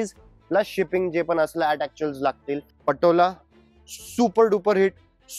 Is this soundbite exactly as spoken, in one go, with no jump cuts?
no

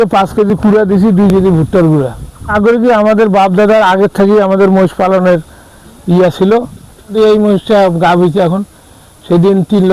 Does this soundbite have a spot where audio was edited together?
yes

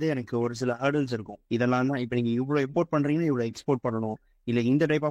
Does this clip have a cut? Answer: no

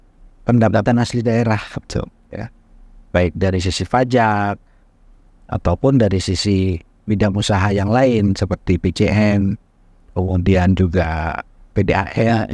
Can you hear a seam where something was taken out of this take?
no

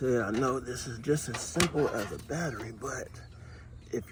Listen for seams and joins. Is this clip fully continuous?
yes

